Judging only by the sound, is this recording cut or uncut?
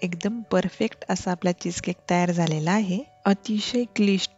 cut